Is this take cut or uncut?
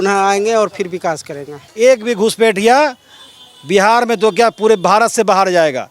cut